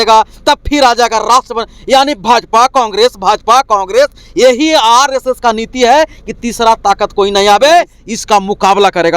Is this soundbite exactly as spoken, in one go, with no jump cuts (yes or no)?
yes